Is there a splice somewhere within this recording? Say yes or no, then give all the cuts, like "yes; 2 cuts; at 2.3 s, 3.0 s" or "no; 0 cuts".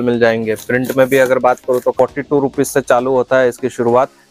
yes; 1 cut; at 2.0 s